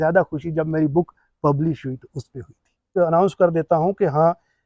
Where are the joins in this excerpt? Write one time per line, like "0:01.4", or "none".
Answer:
0:02.9